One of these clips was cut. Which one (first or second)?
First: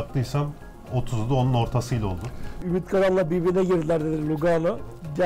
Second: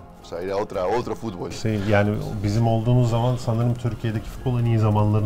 first